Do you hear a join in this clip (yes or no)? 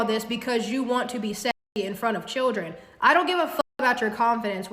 yes